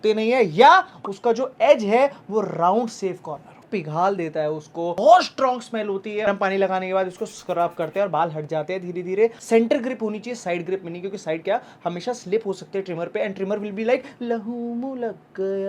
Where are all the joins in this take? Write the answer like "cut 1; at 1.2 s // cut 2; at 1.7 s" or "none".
cut 1; at 3.6 s // cut 2; at 6.3 s // cut 3; at 9.4 s